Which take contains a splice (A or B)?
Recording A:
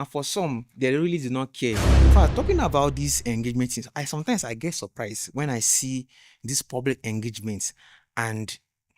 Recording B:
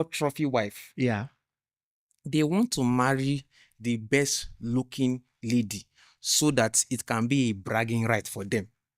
A